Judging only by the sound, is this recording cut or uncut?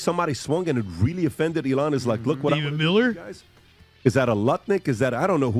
uncut